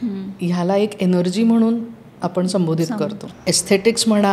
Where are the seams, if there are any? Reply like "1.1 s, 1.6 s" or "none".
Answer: 3.3 s